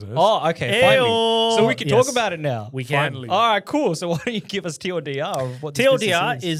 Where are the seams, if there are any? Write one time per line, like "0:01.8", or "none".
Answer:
none